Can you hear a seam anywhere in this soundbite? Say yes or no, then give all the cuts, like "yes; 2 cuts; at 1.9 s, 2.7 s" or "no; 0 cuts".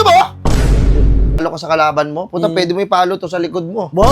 yes; 1 cut; at 1.4 s